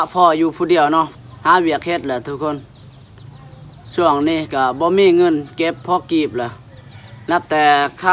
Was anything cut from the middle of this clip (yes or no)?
yes